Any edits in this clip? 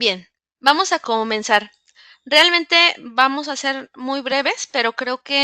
yes; 1 cut; at 1.0 s

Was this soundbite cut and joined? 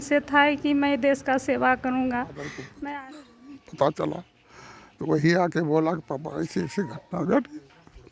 yes; 1 cut; at 3.0 s

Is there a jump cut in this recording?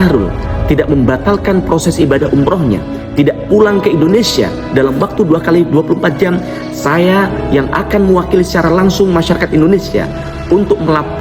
no; 0 cuts

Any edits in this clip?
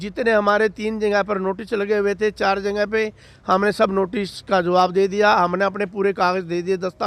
no; 0 cuts

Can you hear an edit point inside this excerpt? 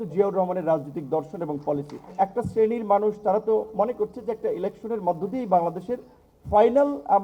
yes; 1 cut; at 2.0 s

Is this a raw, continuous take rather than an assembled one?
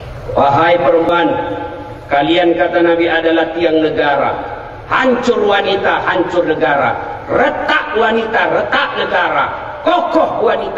no; 1 cut; at 1.1 s

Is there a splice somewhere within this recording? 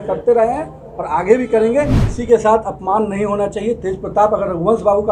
yes; 1 cut; at 2.1 s

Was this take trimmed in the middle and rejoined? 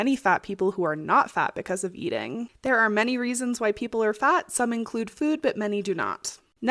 yes; 1 cut; at 2.5 s

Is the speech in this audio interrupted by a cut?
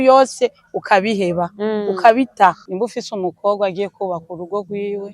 yes; 1 cut; at 2.7 s

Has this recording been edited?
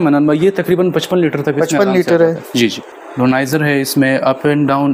no; 0 cuts

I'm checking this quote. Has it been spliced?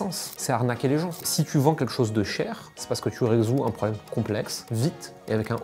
no; 0 cuts

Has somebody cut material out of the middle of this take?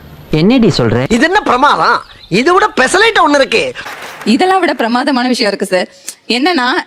yes; 1 cut; at 1.0 s

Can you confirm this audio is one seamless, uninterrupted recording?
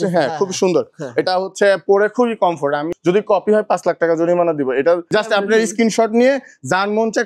no; 2 cuts; at 2.9 s, 5.1 s

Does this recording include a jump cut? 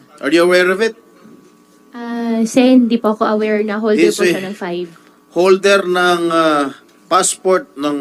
no; 0 cuts

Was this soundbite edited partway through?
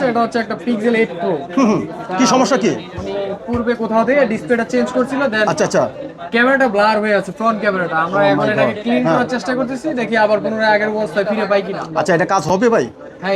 no; 0 cuts

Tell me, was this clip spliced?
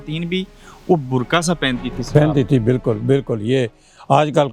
no; 0 cuts

